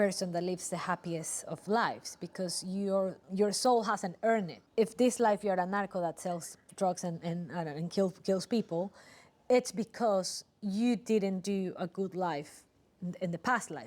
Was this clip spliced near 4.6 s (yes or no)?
yes